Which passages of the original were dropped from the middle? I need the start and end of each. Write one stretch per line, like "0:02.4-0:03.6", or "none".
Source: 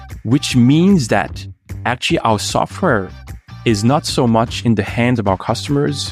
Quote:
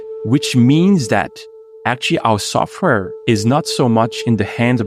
0:03.1-0:03.5